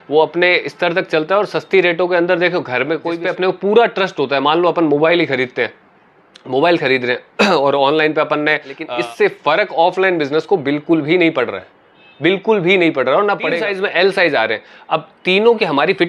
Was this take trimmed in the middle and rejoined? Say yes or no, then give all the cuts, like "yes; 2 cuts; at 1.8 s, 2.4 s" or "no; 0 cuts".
yes; 3 cuts; at 3.1 s, 8.8 s, 13.6 s